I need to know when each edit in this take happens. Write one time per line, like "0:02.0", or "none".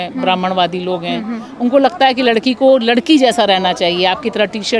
none